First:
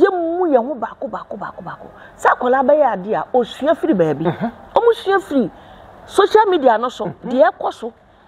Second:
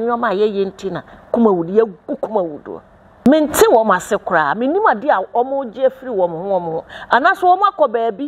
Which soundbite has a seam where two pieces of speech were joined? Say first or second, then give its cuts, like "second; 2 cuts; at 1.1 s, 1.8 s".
second; 1 cut; at 3.3 s